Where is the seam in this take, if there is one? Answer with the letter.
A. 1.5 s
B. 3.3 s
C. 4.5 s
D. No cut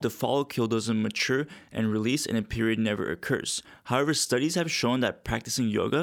D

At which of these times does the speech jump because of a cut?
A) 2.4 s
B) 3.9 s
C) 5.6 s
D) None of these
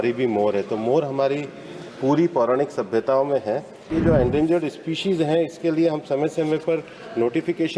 B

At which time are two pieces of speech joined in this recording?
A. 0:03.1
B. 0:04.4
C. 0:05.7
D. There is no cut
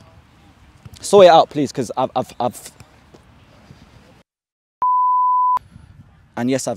C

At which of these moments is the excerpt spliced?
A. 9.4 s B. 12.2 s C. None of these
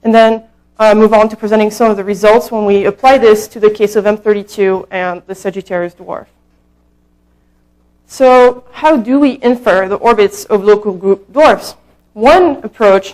B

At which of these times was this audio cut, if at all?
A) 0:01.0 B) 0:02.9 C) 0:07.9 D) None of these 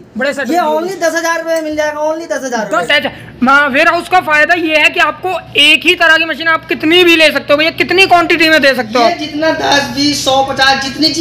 B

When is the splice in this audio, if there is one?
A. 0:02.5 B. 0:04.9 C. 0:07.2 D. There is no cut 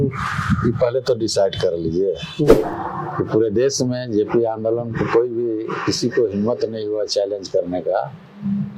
A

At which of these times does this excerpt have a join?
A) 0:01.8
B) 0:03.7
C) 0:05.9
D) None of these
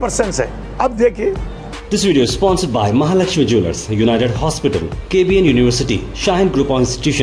A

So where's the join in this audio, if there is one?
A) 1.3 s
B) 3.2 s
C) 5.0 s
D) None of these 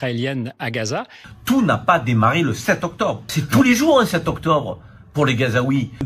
A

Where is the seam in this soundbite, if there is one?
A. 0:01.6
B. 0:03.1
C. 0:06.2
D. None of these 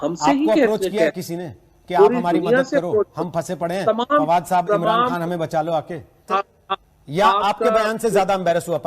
C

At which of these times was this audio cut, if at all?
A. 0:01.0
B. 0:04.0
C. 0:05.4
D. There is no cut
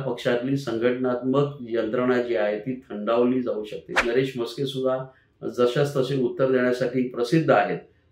B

